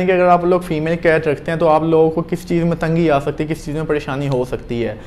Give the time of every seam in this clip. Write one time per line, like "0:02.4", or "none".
none